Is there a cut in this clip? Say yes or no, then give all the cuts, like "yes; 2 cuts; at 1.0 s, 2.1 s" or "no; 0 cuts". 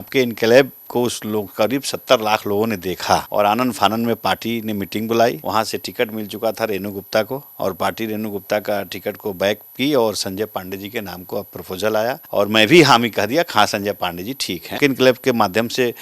yes; 5 cuts; at 3.3 s, 5.4 s, 7.4 s, 12.2 s, 14.7 s